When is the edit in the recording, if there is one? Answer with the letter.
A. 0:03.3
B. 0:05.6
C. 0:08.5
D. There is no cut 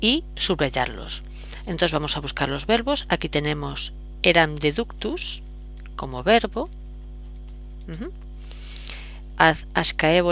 A